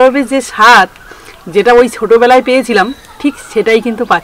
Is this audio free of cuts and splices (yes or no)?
yes